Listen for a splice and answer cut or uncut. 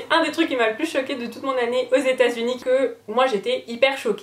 cut